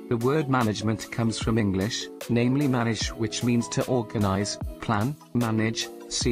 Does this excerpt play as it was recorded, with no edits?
yes; 0 cuts

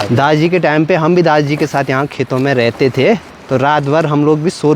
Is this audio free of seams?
yes; 0 cuts

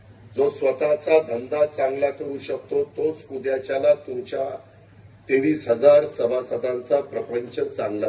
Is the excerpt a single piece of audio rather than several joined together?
yes; 0 cuts

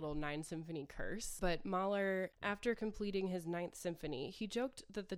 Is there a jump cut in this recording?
yes; 2 cuts; at 1.3 s, 2.4 s

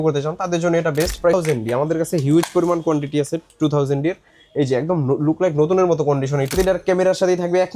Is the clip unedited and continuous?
no; 2 cuts; at 1.3 s, 6.5 s

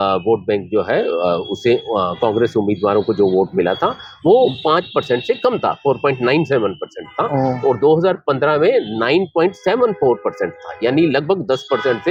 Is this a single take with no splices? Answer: yes; 0 cuts

